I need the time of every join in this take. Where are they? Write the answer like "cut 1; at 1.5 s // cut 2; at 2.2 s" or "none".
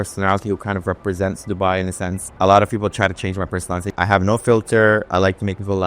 cut 1; at 2.2 s // cut 2; at 3.9 s